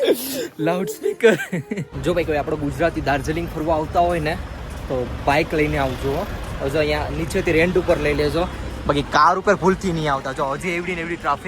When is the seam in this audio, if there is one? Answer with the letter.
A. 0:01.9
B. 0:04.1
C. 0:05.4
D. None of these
A